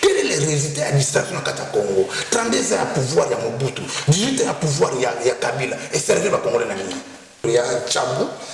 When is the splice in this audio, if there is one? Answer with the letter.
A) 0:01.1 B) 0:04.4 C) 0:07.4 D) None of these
C